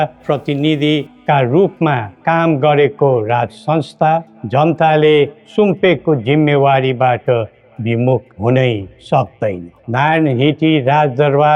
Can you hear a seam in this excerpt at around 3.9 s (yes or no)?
no